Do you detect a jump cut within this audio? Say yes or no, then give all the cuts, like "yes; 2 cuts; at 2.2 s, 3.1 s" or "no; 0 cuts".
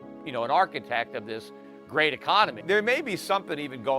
yes; 1 cut; at 2.6 s